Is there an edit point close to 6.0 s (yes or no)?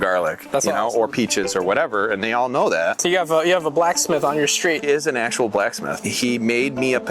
yes